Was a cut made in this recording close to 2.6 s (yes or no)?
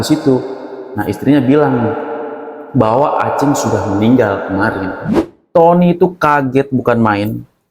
no